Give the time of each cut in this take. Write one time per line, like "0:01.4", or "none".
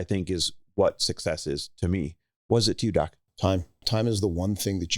0:03.8